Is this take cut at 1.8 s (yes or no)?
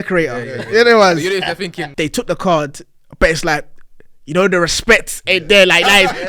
yes